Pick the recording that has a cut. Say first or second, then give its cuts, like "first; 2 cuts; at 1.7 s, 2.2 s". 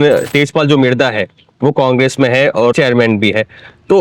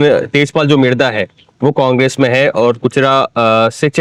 first; 1 cut; at 2.7 s